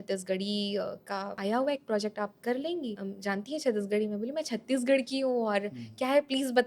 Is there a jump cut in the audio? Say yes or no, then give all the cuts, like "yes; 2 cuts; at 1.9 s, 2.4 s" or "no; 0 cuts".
yes; 2 cuts; at 1.3 s, 3.1 s